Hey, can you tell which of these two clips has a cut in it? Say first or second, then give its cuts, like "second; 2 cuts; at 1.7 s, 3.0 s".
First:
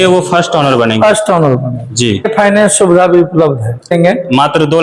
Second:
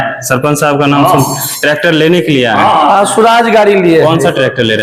first; 2 cuts; at 2.3 s, 3.9 s